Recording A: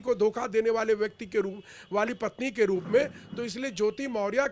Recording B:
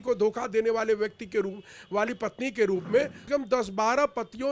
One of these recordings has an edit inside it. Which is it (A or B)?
B